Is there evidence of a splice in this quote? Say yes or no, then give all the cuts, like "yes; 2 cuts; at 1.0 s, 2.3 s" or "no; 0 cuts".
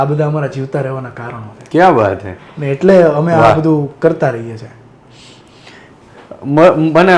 no; 0 cuts